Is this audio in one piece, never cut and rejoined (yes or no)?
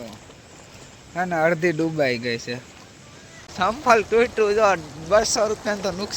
no